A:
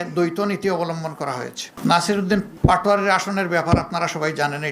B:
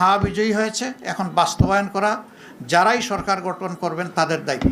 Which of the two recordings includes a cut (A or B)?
A